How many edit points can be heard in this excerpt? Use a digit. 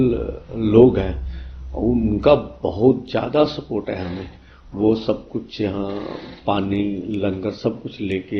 0